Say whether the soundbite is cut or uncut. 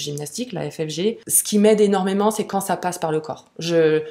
cut